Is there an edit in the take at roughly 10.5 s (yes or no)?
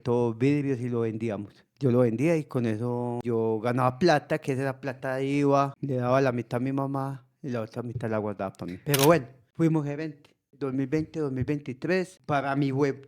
yes